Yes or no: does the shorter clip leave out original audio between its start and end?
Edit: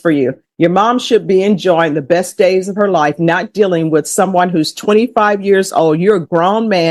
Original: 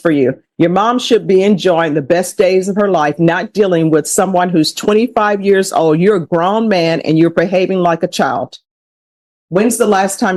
no